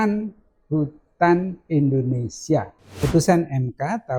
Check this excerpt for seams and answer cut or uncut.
cut